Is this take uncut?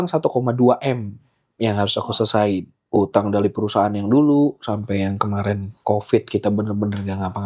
no; 1 cut; at 2.8 s

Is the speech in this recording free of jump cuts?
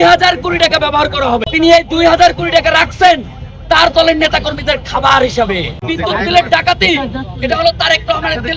no; 2 cuts; at 1.4 s, 5.9 s

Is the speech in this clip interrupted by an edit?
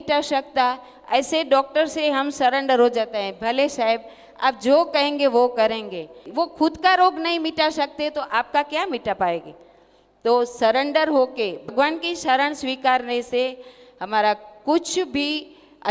yes; 2 cuts; at 6.2 s, 11.7 s

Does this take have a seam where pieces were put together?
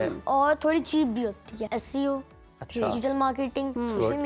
yes; 1 cut; at 1.6 s

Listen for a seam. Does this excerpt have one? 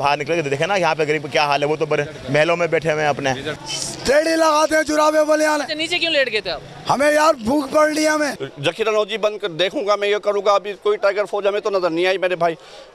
yes; 2 cuts; at 3.5 s, 8.4 s

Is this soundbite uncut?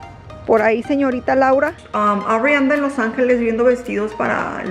no; 1 cut; at 1.8 s

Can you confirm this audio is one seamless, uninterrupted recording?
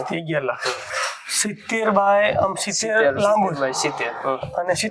yes; 0 cuts

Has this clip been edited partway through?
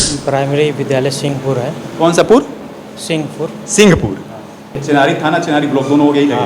yes; 1 cut; at 4.8 s

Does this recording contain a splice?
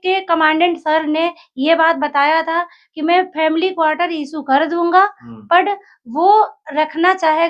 no; 0 cuts

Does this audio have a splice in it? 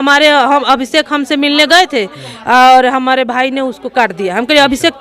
no; 0 cuts

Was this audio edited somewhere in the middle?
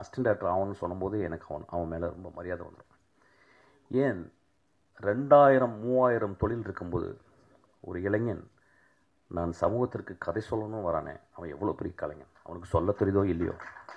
no; 0 cuts

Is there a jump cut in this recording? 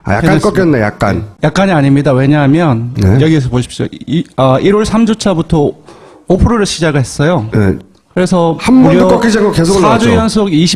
no; 0 cuts

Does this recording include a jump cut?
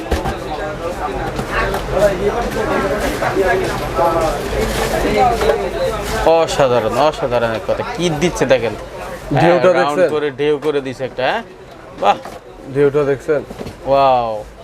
no; 0 cuts

